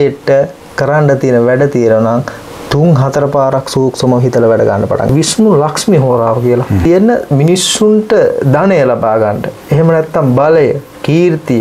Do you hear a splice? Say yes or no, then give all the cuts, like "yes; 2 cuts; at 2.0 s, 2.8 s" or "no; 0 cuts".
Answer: yes; 2 cuts; at 5.1 s, 6.8 s